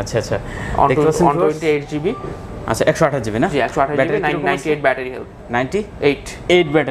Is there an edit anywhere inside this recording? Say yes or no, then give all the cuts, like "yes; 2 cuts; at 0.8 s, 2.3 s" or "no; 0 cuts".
no; 0 cuts